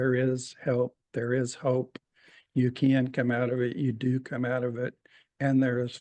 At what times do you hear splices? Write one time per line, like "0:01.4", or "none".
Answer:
none